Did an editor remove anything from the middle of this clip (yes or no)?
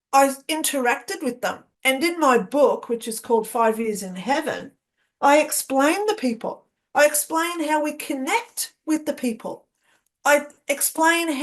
yes